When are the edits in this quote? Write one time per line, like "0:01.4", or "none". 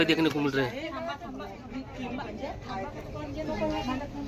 none

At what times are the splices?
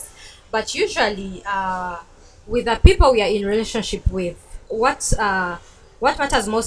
none

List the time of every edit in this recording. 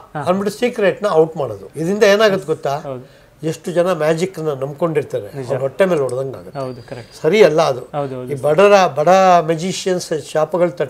0:01.6
0:07.1

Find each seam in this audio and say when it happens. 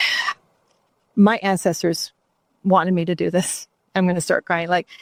none

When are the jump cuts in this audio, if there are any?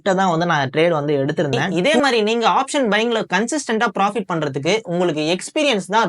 0:01.7

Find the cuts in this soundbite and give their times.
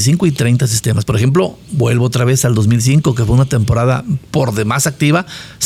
none

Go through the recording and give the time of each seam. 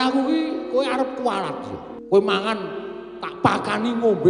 0:01.8

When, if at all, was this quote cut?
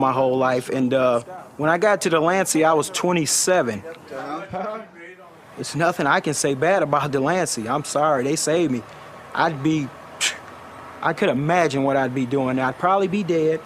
0:08.5

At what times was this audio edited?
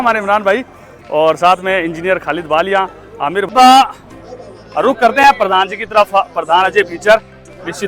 0:03.5

